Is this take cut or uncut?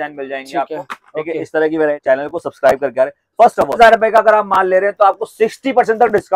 cut